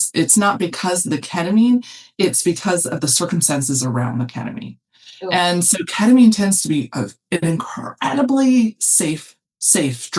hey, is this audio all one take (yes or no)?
yes